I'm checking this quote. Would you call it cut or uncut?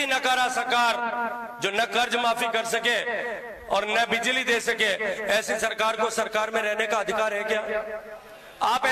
uncut